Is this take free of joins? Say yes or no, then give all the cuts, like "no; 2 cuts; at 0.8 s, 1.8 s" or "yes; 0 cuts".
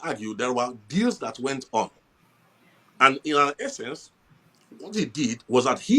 yes; 0 cuts